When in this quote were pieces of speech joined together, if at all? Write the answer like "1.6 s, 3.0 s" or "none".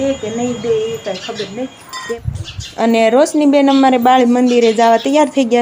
2.1 s